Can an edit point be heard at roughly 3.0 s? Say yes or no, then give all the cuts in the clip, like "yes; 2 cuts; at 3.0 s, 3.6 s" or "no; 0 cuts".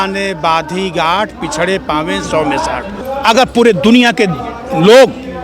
yes; 1 cut; at 3.0 s